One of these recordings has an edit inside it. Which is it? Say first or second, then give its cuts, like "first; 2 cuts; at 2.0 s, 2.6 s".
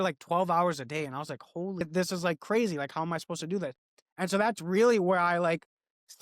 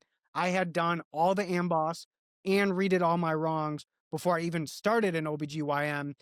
first; 1 cut; at 1.8 s